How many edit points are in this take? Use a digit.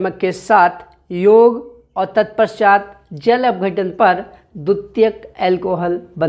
0